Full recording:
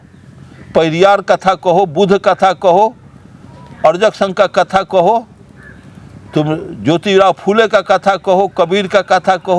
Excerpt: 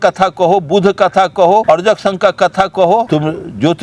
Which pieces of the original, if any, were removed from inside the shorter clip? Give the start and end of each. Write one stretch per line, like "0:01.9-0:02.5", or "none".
0:02.9-0:03.8
0:05.2-0:06.3